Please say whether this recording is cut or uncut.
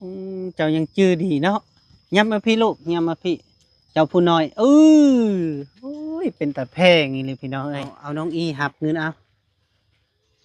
cut